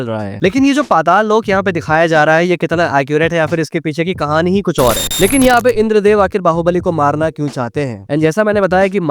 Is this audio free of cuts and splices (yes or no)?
no